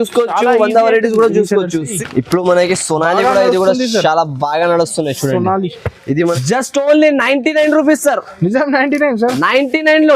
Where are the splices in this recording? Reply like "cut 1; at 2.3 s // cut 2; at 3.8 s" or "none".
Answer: cut 1; at 2.0 s // cut 2; at 6.2 s

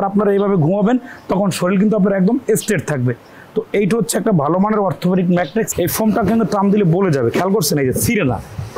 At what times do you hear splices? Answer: cut 1; at 5.7 s

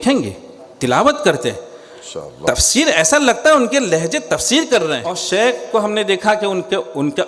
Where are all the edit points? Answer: cut 1; at 5.2 s

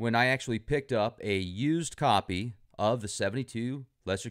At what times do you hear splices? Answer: cut 1; at 1.8 s

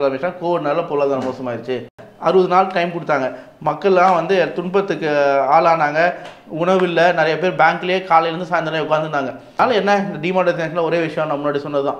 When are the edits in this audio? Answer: cut 1; at 2.0 s // cut 2; at 9.5 s

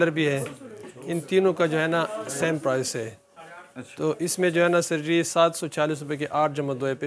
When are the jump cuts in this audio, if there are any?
none

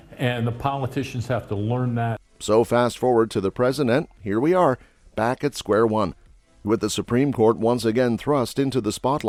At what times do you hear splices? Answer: none

